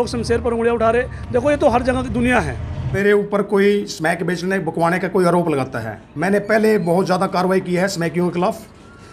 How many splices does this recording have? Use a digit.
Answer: 1